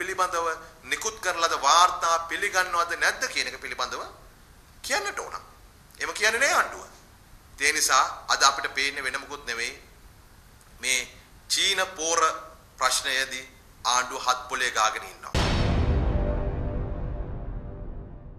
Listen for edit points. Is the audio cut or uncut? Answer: cut